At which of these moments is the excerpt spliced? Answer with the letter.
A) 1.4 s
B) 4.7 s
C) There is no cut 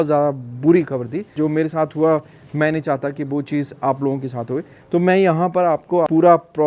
C